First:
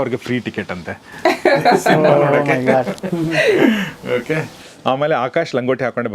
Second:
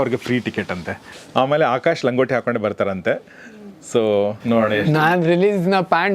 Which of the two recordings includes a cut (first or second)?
second